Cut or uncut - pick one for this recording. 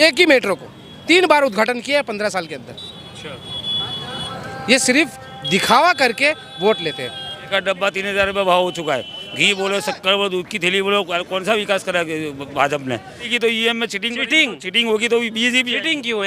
cut